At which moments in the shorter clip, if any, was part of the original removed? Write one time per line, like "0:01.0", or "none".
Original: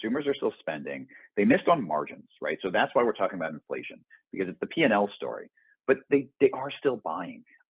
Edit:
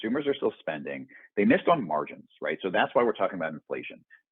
none